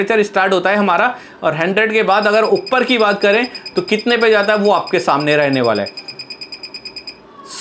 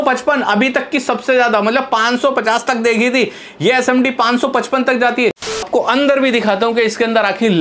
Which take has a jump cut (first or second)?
second